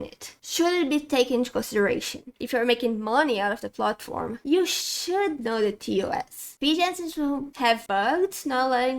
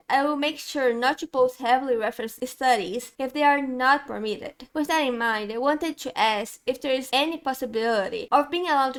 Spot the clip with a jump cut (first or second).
first